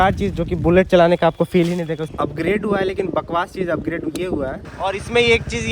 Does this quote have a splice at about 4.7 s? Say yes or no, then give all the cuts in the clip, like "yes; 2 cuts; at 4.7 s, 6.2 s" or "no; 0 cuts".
yes; 2 cuts; at 2.1 s, 4.7 s